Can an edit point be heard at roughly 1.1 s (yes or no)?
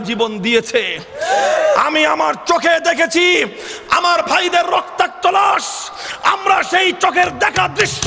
no